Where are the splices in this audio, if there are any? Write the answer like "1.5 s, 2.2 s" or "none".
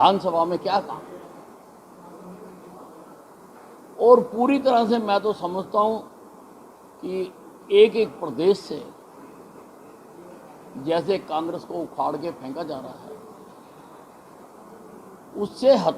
1.6 s